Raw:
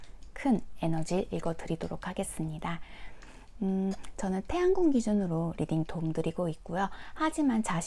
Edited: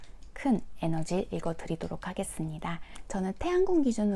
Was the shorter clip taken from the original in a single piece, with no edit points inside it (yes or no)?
no